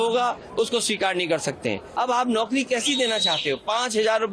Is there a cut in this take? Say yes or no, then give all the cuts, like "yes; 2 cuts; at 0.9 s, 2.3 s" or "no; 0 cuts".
yes; 1 cut; at 1.9 s